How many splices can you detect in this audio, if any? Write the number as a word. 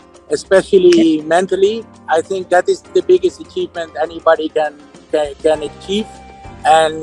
one